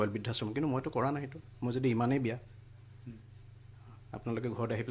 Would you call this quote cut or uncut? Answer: uncut